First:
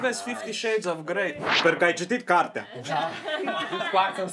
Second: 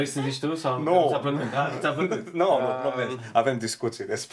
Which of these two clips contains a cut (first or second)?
first